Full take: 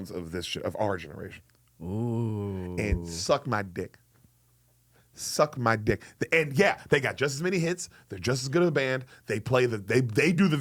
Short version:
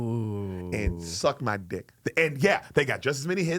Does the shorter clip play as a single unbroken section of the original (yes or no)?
no